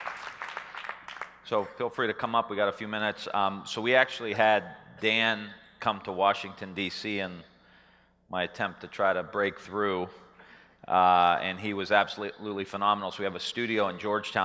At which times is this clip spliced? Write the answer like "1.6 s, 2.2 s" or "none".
13.4 s